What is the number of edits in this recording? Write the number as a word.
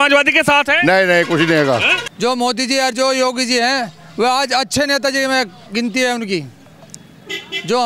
one